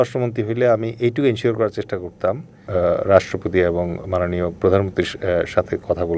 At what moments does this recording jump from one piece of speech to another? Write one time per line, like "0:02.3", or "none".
0:02.7